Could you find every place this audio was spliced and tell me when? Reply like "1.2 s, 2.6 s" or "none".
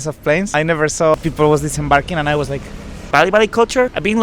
3.0 s